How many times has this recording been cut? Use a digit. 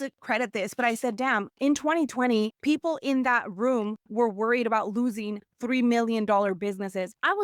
1